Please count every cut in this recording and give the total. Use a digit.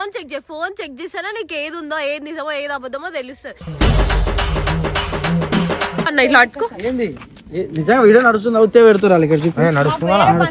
1